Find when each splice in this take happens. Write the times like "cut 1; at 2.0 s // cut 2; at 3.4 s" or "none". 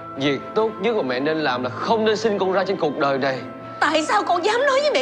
none